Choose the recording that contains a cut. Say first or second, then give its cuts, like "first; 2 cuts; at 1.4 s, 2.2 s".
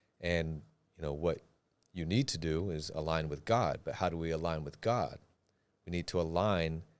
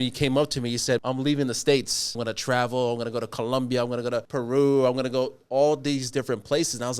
second; 3 cuts; at 1.0 s, 2.2 s, 4.3 s